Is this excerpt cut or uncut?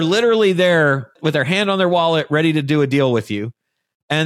cut